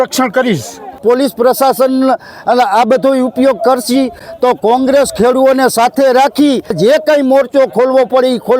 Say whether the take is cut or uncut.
cut